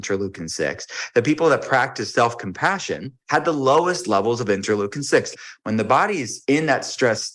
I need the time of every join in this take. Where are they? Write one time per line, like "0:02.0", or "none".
0:03.1
0:05.3
0:06.3